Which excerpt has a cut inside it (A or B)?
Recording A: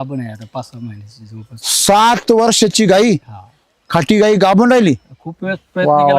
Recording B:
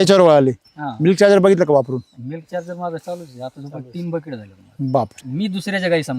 B